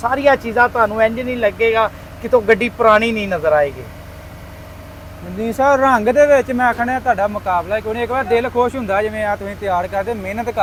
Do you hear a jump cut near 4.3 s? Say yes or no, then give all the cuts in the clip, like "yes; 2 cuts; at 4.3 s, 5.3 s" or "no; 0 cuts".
no; 0 cuts